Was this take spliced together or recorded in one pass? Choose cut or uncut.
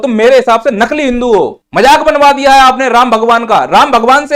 cut